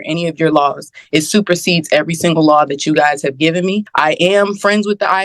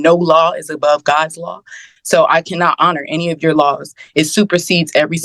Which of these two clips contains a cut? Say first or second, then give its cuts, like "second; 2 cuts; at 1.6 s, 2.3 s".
first; 1 cut; at 3.9 s